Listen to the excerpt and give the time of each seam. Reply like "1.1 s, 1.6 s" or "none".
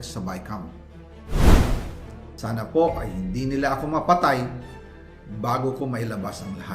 1.2 s